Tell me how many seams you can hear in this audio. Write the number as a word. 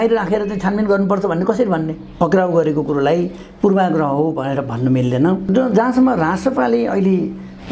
two